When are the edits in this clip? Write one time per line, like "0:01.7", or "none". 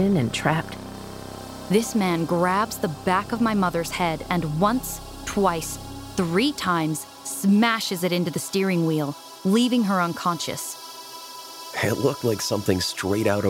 0:01.3
0:11.3